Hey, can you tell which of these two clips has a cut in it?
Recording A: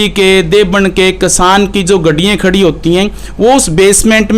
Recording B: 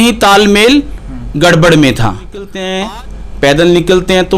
B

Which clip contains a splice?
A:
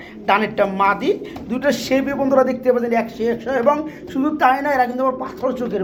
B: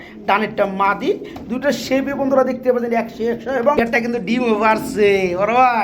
B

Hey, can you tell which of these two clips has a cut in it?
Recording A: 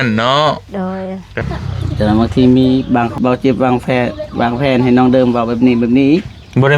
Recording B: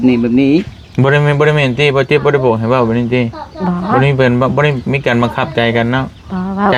A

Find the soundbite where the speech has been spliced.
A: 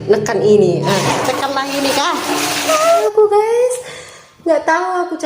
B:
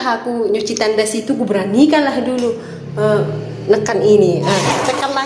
A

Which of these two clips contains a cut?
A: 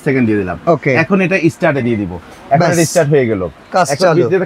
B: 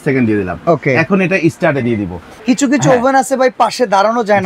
B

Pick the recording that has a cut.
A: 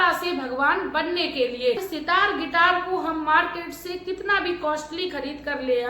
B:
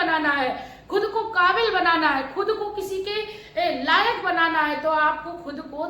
A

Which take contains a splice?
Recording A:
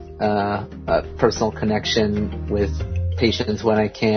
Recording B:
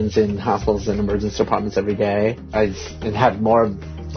B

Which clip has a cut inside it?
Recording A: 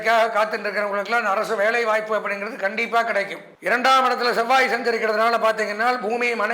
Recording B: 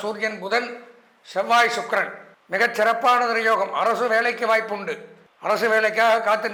A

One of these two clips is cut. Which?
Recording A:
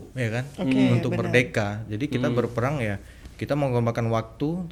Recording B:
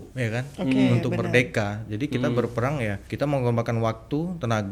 B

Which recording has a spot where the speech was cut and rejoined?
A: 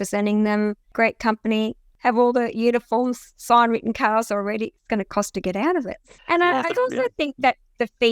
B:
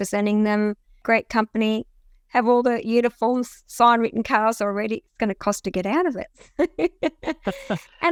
A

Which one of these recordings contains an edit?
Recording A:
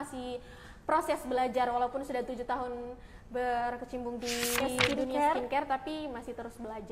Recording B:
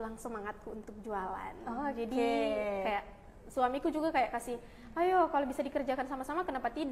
A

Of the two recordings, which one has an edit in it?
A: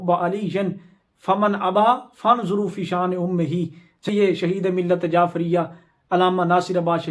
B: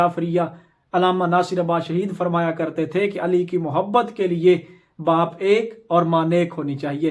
A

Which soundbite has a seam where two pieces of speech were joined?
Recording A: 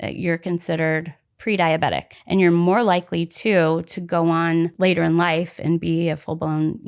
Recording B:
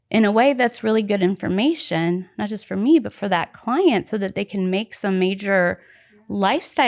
A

